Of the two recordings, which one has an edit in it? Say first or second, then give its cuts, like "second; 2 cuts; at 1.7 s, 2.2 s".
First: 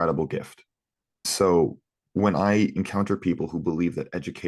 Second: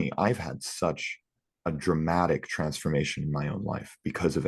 first; 1 cut; at 1.3 s